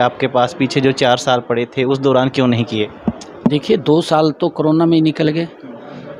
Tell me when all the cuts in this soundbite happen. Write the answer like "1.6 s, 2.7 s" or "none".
none